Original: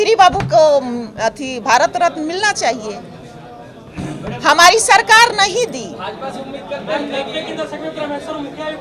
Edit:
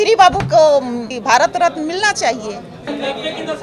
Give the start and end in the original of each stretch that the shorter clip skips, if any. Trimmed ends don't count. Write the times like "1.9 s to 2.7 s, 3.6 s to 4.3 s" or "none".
1.1 s to 1.5 s, 3.3 s to 7.0 s